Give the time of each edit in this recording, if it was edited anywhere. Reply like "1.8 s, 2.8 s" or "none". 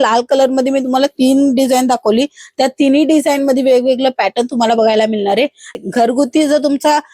5.7 s